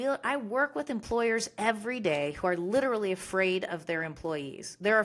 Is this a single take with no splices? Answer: yes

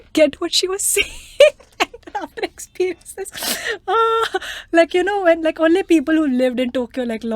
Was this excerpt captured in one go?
yes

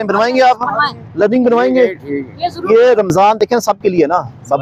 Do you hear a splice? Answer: no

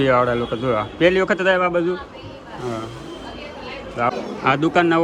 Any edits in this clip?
yes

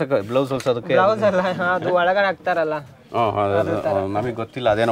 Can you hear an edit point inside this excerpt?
no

